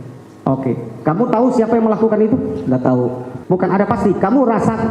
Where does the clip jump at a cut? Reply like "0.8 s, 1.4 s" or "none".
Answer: 3.3 s